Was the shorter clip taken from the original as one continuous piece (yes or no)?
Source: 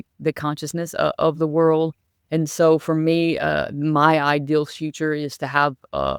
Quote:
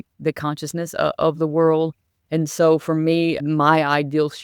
no